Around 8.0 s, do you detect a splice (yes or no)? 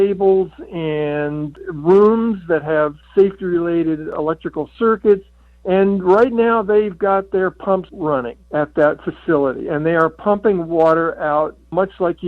yes